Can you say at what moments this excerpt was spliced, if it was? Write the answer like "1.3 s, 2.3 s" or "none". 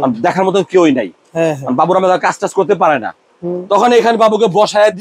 none

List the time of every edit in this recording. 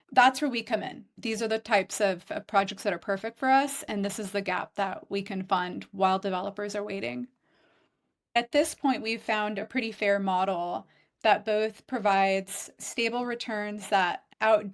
1.2 s, 8.4 s

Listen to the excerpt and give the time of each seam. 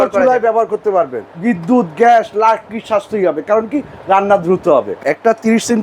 1.2 s, 4.9 s

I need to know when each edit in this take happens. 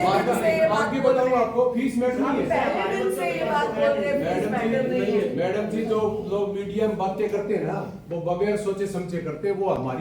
none

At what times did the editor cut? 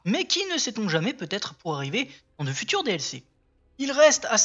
none

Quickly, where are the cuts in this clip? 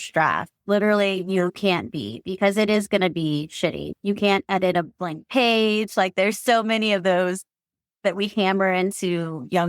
1.6 s, 3.8 s

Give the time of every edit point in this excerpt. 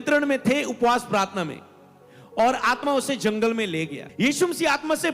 4.0 s

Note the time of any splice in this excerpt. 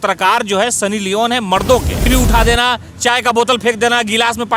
2.1 s

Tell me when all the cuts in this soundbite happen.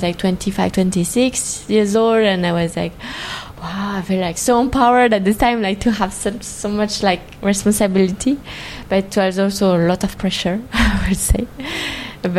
none

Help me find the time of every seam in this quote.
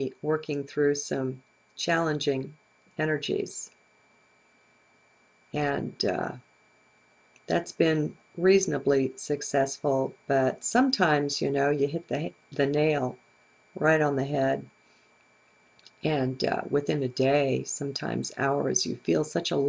15.8 s

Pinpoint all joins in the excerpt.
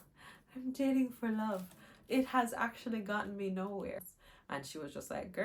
4.1 s

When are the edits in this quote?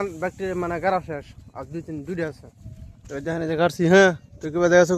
none

